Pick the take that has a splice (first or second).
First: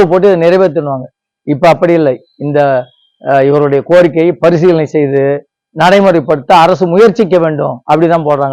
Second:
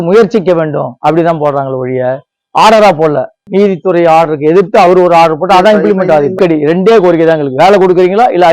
second